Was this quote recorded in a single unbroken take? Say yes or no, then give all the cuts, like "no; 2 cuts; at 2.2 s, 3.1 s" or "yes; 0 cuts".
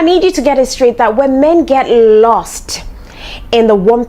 yes; 0 cuts